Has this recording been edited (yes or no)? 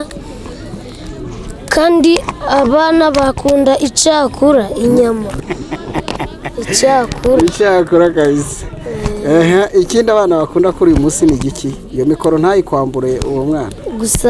no